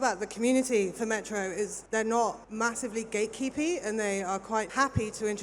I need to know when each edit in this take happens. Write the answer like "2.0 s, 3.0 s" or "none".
1.8 s, 2.4 s, 4.7 s